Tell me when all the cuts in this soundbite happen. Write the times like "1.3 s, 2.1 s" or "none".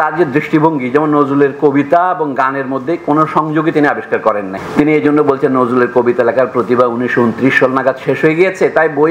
none